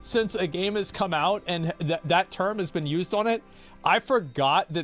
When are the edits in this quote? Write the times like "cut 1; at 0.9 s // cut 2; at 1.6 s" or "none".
none